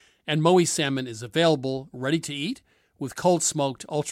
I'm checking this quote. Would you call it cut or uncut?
uncut